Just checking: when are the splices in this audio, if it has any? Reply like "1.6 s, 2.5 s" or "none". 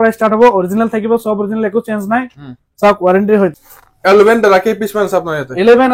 3.7 s